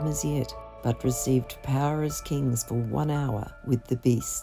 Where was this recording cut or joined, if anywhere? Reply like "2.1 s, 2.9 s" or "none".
3.5 s